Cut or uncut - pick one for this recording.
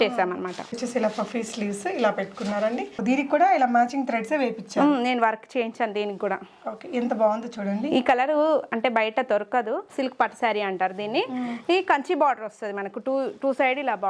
cut